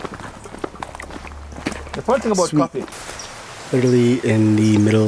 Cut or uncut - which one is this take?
cut